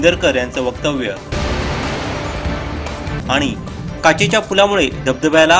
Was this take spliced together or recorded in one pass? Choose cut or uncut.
uncut